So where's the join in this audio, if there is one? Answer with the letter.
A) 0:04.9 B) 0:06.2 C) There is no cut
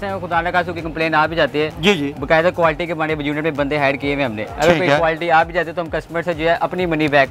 C